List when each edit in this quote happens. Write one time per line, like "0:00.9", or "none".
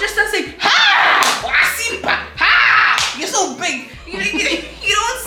none